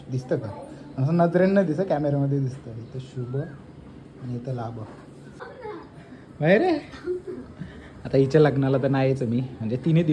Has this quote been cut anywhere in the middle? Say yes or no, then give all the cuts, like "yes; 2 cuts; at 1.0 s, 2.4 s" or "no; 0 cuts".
yes; 1 cut; at 5.4 s